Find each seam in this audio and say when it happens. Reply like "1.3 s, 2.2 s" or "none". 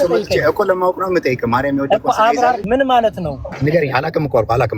2.6 s, 3.5 s